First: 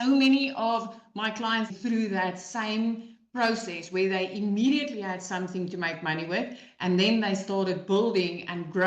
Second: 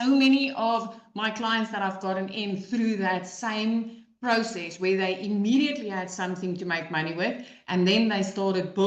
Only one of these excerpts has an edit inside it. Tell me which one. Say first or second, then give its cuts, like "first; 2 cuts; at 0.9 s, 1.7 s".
first; 1 cut; at 1.7 s